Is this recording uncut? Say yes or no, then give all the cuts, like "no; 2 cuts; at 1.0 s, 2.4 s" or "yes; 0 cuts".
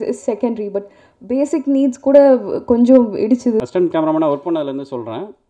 no; 1 cut; at 3.6 s